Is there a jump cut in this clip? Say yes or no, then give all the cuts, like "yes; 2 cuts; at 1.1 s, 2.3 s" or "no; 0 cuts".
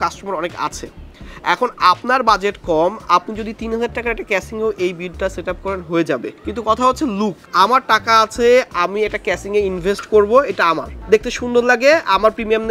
yes; 3 cuts; at 6.4 s, 7.4 s, 10.9 s